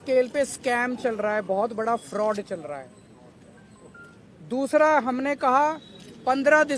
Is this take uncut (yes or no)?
yes